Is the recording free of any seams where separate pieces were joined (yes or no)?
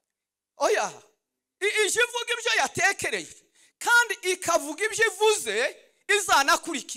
yes